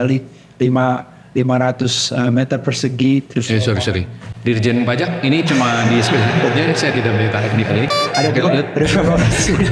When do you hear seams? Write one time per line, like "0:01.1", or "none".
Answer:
none